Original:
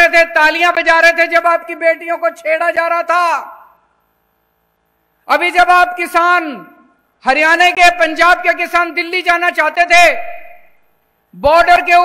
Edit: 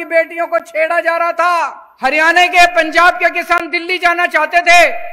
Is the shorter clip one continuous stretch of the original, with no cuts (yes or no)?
no